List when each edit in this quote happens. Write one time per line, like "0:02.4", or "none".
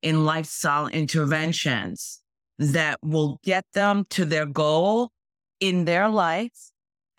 none